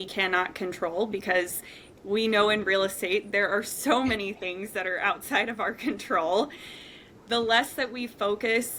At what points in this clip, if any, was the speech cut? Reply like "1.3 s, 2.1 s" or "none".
none

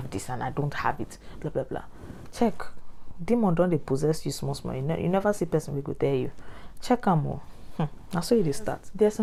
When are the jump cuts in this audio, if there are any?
none

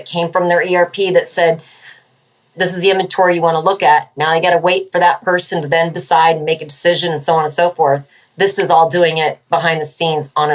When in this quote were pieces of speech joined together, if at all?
2.5 s

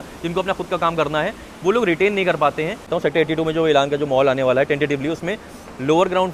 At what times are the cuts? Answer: 2.9 s

